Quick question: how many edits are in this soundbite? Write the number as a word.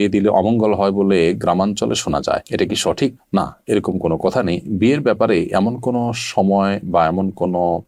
zero